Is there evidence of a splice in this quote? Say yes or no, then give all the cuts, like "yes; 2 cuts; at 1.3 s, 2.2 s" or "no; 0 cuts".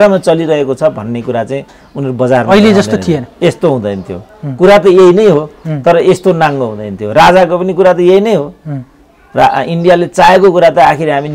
no; 0 cuts